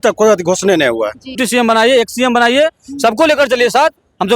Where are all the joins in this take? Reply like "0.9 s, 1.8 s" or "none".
1.4 s